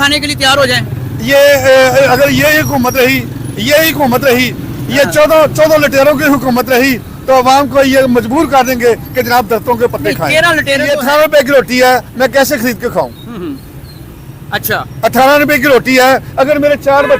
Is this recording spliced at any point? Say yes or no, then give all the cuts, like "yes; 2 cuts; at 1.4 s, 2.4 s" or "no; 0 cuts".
yes; 1 cut; at 10.9 s